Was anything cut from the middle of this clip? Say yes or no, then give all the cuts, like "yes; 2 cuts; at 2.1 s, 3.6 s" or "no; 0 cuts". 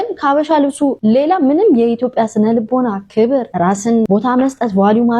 yes; 2 cuts; at 1.0 s, 3.7 s